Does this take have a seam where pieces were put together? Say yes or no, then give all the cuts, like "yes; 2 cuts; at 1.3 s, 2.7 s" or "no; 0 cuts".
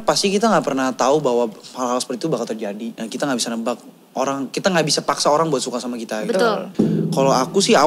yes; 2 cuts; at 2.9 s, 6.7 s